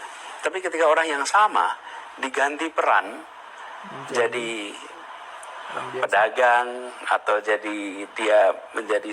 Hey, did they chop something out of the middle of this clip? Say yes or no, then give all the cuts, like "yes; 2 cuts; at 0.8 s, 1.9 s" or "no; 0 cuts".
yes; 1 cut; at 6.6 s